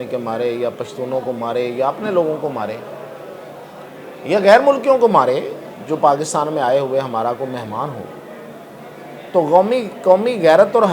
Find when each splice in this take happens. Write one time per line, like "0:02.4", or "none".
none